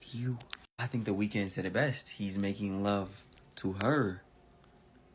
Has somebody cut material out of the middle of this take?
no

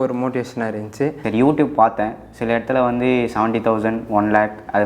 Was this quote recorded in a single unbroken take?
no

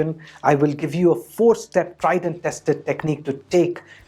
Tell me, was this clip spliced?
no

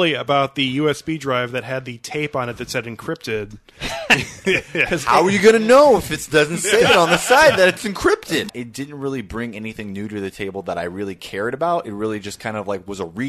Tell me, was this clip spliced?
yes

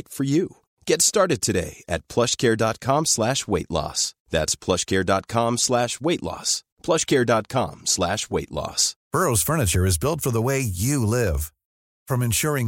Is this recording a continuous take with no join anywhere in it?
no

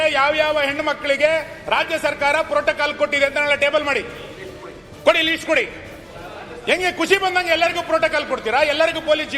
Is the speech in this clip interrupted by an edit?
no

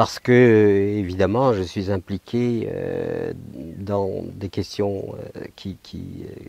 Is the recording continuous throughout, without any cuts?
yes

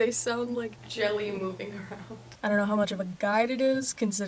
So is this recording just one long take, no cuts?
no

